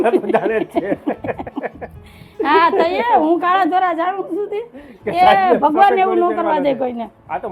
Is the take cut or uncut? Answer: uncut